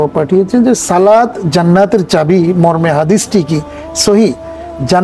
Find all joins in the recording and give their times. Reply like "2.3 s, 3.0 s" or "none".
none